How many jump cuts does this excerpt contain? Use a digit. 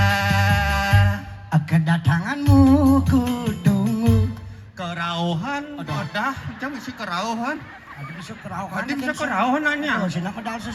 0